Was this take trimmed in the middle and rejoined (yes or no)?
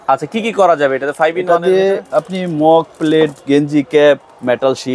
no